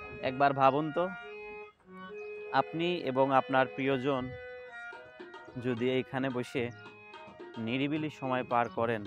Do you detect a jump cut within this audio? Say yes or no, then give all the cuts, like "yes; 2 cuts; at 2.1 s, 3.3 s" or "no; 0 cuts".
yes; 2 cuts; at 1.2 s, 2.5 s